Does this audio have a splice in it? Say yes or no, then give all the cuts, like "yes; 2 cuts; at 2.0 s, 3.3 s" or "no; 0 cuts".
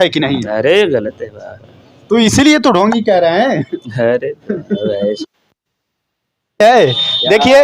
no; 0 cuts